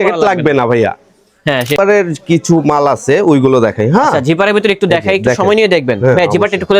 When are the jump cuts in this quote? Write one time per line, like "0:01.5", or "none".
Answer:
0:01.7